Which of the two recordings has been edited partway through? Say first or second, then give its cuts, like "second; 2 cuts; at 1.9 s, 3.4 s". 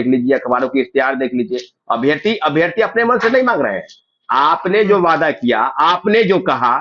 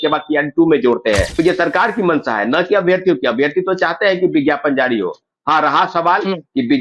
second; 1 cut; at 1.3 s